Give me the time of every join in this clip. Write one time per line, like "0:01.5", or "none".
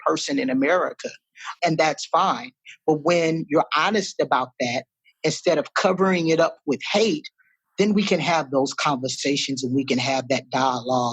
0:01.5